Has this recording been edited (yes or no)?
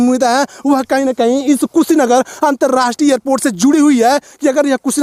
no